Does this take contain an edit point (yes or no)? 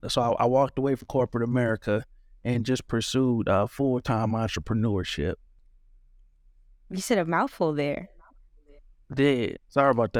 no